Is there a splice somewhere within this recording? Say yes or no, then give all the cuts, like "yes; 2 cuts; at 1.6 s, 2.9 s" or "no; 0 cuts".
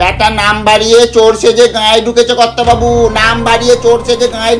no; 0 cuts